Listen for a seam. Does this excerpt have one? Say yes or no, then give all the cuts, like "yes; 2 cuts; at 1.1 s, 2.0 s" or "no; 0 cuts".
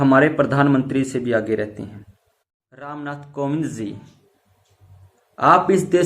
yes; 1 cut; at 2.7 s